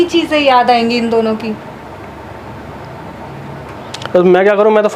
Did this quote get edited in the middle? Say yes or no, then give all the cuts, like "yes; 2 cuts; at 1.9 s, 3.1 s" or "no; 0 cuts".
no; 0 cuts